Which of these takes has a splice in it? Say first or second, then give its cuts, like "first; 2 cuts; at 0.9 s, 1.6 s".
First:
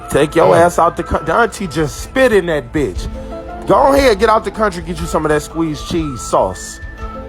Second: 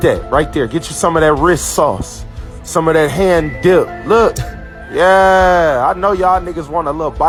first; 1 cut; at 6.2 s